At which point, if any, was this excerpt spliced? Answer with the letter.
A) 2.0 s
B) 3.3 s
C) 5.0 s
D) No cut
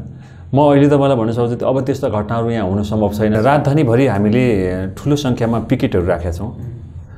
B